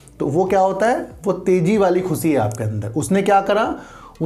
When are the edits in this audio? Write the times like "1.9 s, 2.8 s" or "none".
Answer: none

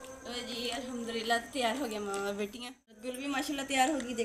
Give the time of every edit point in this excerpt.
3.1 s

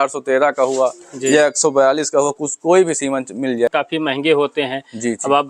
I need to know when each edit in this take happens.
3.7 s

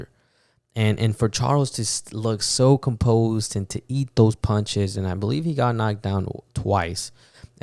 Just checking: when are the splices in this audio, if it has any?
none

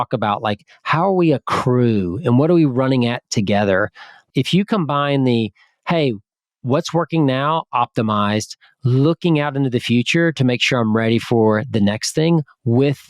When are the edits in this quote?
4.2 s

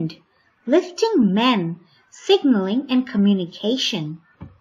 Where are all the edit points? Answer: 2.6 s

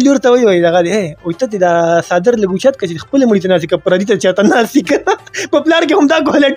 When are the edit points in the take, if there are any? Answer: none

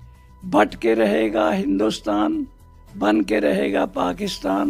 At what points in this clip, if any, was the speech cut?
none

